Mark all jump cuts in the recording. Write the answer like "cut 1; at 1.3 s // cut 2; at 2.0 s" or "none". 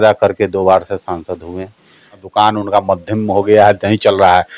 cut 1; at 2.2 s